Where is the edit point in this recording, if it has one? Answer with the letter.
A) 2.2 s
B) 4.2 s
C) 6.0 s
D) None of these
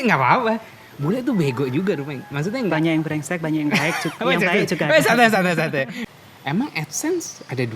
C